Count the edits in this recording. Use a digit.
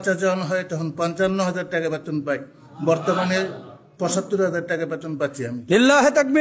0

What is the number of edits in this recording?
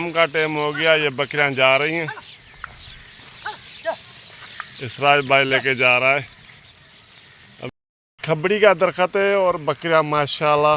1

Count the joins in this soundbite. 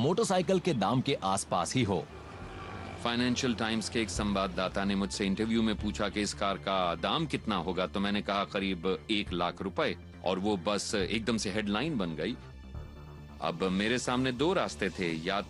1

